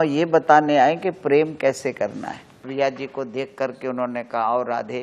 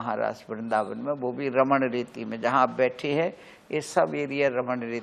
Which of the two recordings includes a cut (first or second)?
first